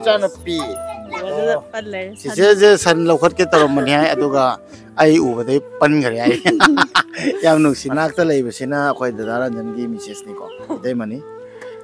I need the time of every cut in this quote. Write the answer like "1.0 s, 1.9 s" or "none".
1.2 s, 7.8 s